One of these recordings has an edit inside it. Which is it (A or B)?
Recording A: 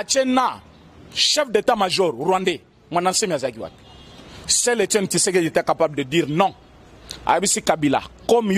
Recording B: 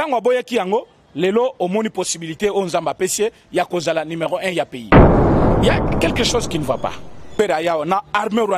B